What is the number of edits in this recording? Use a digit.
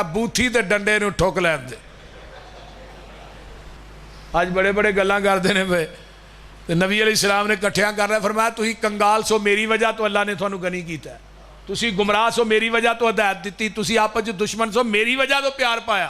1